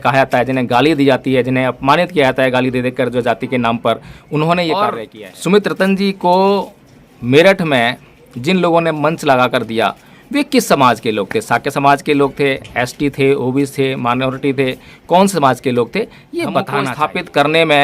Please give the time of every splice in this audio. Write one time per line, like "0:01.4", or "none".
0:05.1
0:16.9